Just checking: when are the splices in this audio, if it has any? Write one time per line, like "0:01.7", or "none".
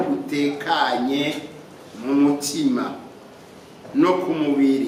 none